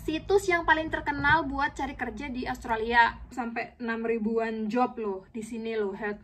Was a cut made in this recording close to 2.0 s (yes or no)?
no